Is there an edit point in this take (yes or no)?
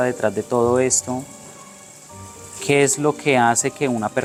no